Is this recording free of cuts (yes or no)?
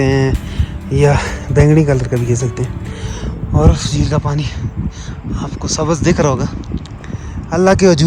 yes